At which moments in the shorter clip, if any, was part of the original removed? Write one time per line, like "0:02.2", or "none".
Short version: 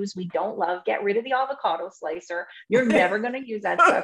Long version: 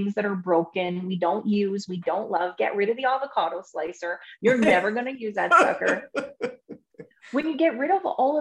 none